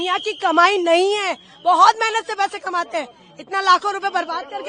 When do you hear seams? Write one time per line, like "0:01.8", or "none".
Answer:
none